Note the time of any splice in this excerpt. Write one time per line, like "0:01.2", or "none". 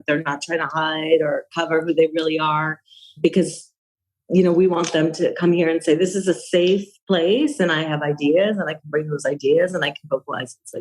0:03.2